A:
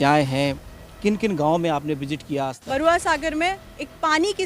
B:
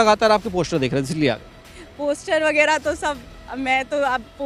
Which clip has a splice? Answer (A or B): A